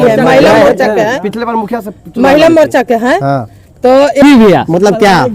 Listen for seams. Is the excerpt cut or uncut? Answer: cut